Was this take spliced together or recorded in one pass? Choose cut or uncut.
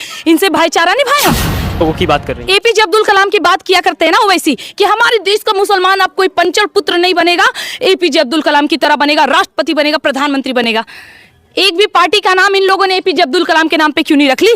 cut